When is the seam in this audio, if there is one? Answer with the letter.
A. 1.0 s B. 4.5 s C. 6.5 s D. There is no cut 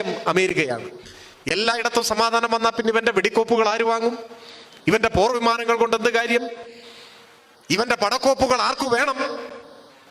D